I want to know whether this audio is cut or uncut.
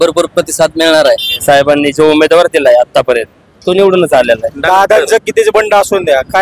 cut